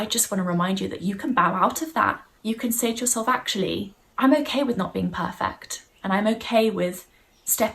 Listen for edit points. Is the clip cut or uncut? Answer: cut